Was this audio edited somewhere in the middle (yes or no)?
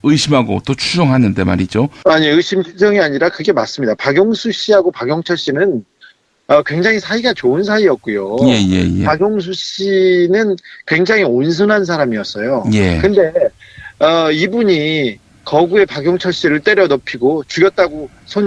no